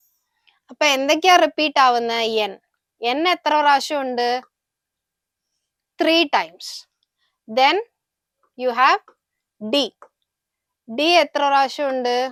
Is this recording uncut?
yes; 0 cuts

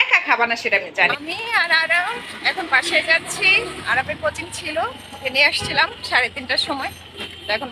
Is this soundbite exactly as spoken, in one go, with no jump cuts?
no; 1 cut; at 1.1 s

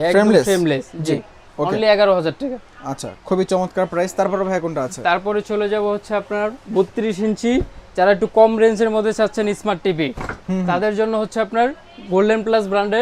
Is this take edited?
no; 0 cuts

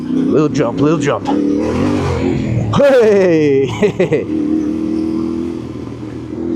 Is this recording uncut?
yes; 0 cuts

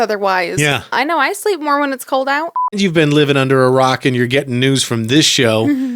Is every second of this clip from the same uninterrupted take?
no; 2 cuts; at 0.9 s, 2.8 s

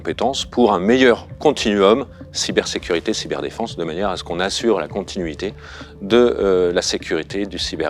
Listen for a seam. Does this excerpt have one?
no; 0 cuts

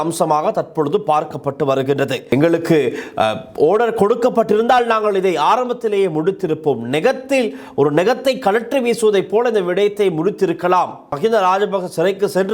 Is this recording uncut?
no; 2 cuts; at 2.2 s, 11.0 s

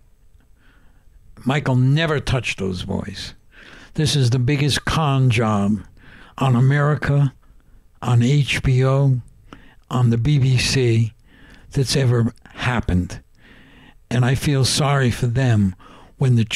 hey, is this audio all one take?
yes; 0 cuts

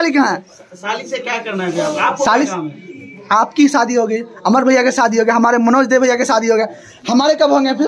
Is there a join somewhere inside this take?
no; 0 cuts

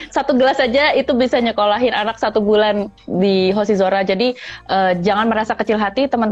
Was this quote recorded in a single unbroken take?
yes; 0 cuts

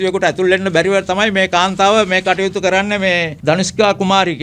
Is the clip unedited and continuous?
no; 1 cut; at 3.3 s

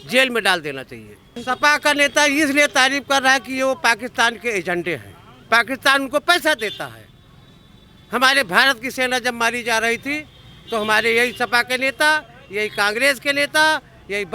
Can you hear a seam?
yes; 1 cut; at 1.4 s

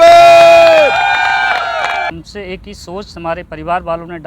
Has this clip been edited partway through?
yes; 1 cut; at 2.1 s

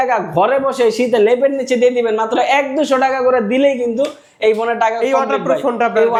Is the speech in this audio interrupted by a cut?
no; 0 cuts

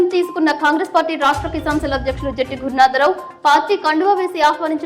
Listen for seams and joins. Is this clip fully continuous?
yes; 0 cuts

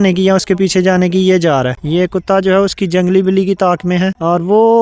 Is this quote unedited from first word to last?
yes; 0 cuts

